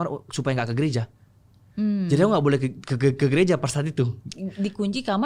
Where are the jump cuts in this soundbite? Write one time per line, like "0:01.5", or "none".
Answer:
none

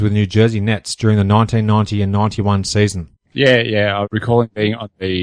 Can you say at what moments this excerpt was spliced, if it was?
0:03.2

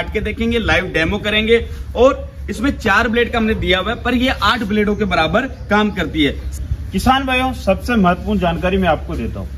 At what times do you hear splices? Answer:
none

